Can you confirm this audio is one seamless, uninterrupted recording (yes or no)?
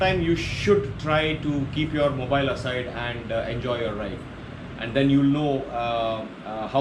yes